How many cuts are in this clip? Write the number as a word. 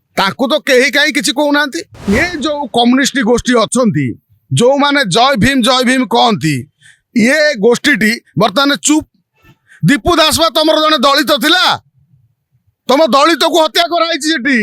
one